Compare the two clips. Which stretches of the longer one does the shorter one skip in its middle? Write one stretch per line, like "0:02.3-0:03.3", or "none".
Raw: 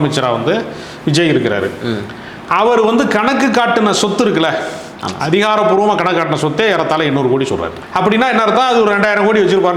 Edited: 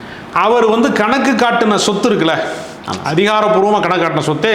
none